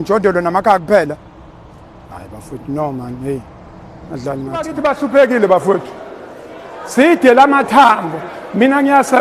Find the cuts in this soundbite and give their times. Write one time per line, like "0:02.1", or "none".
0:04.7